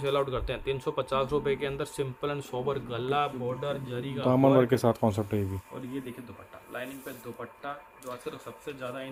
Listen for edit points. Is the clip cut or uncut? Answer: uncut